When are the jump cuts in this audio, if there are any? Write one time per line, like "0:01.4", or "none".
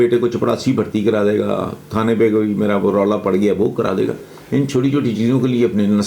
none